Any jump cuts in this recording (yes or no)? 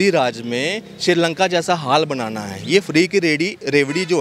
no